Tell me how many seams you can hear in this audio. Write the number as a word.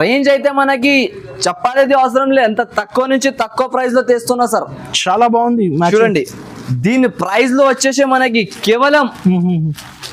zero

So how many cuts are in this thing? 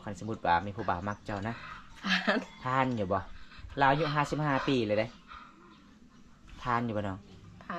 zero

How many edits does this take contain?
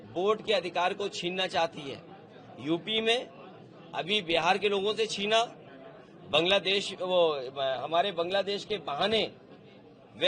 zero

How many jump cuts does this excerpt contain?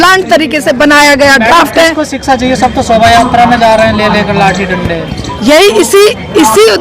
zero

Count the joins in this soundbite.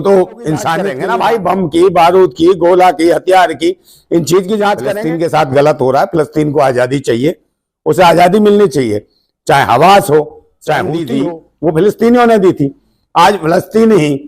three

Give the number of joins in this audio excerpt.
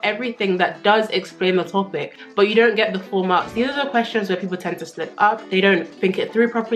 two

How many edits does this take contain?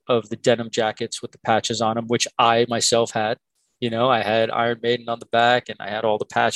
zero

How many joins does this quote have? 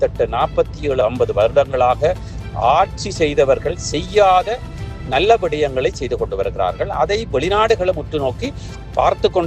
one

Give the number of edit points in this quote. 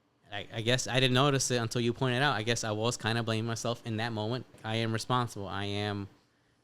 one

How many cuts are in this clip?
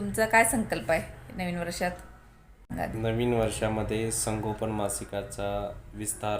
one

